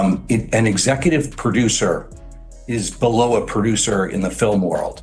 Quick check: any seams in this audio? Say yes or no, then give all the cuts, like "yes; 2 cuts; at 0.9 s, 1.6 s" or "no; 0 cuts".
no; 0 cuts